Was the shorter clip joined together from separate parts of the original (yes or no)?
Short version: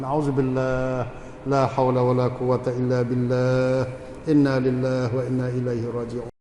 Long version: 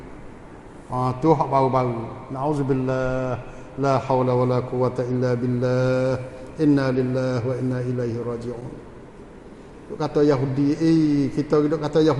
no